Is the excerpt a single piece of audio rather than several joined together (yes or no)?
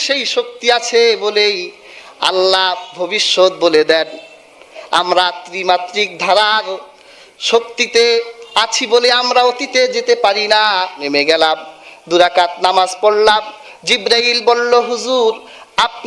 no